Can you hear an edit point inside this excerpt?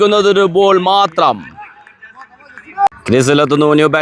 no; 0 cuts

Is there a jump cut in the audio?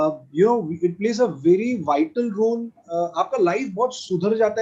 no; 0 cuts

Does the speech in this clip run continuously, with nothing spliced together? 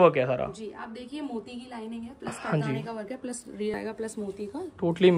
no; 1 cut; at 3.7 s

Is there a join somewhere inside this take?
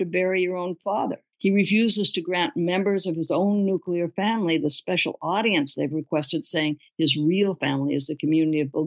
yes; 1 cut; at 1.2 s

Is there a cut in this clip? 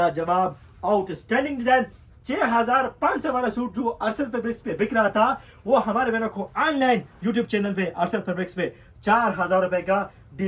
no; 0 cuts

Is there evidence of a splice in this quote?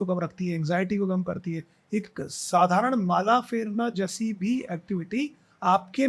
no; 0 cuts

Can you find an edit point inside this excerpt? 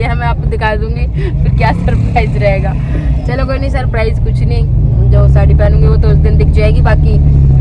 no; 0 cuts

